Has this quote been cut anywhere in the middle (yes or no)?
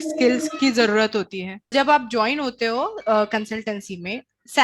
yes